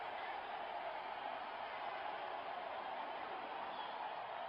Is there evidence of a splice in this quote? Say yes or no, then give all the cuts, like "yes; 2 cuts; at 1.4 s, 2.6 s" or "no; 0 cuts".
no; 0 cuts